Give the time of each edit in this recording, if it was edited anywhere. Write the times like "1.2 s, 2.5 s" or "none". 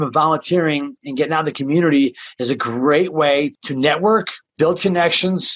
3.6 s, 4.4 s